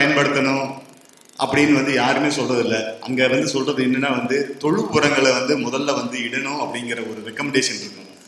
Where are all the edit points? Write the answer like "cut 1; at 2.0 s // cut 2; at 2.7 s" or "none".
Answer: none

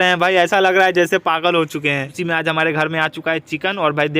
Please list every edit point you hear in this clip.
cut 1; at 2.1 s

